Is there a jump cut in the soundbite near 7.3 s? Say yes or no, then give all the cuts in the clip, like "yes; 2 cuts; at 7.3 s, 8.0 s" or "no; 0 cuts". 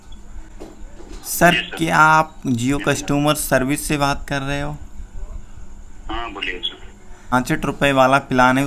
yes; 1 cut; at 7.3 s